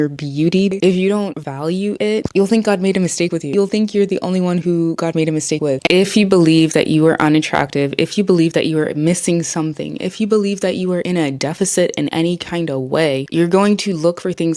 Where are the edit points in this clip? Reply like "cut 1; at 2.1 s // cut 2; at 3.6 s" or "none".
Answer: cut 1; at 0.7 s // cut 2; at 3.5 s // cut 3; at 5.8 s